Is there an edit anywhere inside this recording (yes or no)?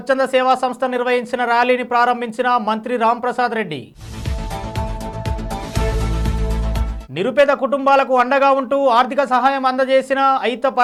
no